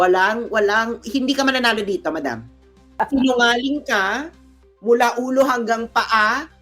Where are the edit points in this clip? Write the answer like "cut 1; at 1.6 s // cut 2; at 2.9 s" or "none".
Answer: cut 1; at 2.8 s

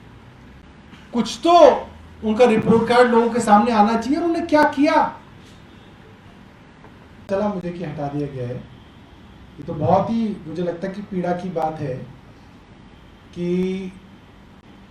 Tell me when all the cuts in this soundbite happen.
cut 1; at 7.1 s

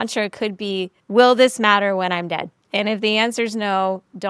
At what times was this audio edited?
cut 1; at 1.0 s // cut 2; at 2.6 s

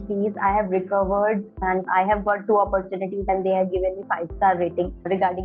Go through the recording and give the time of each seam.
cut 1; at 1.6 s // cut 2; at 3.3 s

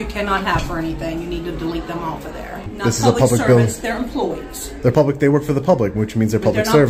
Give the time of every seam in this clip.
cut 1; at 2.7 s

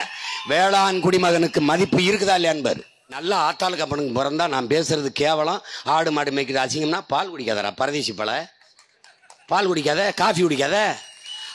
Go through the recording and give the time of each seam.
cut 1; at 3.2 s

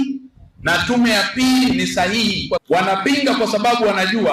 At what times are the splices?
cut 1; at 2.6 s

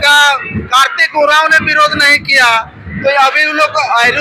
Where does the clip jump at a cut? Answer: none

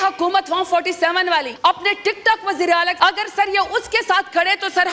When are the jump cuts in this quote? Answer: cut 1; at 1.5 s // cut 2; at 2.9 s

